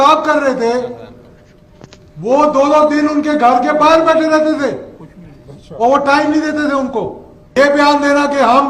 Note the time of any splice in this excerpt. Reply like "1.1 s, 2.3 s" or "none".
7.5 s